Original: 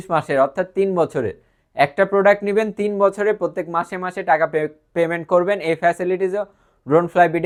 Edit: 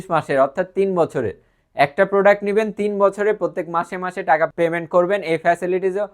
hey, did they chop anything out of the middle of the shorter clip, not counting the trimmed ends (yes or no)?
yes